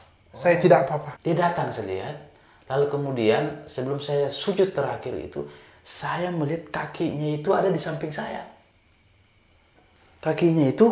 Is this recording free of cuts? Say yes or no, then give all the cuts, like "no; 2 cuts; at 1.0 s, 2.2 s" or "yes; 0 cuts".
no; 1 cut; at 1.1 s